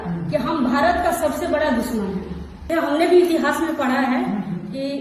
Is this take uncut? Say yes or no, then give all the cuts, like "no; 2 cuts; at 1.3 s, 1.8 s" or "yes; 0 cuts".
no; 1 cut; at 2.7 s